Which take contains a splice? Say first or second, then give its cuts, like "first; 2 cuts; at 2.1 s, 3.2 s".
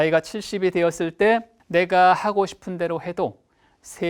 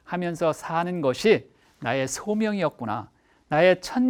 first; 1 cut; at 1.6 s